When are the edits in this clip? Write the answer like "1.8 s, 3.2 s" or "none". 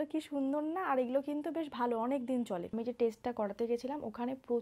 2.7 s

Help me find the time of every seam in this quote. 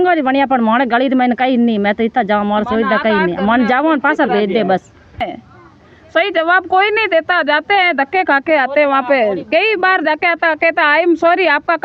5.2 s

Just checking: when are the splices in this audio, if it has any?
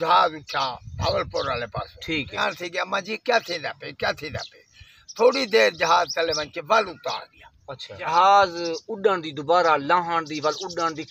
2.4 s, 8.1 s

